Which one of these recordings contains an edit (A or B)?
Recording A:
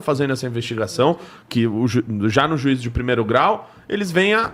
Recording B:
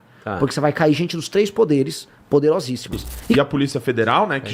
B